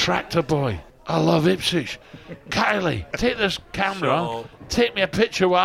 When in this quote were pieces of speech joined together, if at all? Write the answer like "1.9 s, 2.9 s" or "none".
0.9 s, 3.1 s